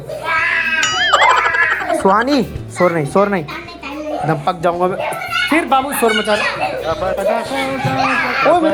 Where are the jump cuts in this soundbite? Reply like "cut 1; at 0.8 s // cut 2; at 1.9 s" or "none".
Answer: none